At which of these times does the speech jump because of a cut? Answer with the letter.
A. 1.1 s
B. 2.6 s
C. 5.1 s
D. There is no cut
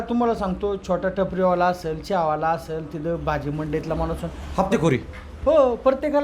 D